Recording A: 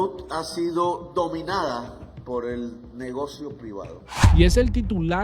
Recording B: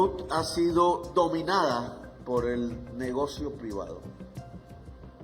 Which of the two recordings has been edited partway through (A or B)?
A